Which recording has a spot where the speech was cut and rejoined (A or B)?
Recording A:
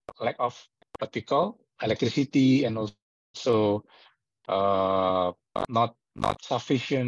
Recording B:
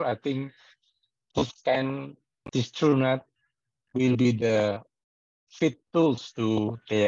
B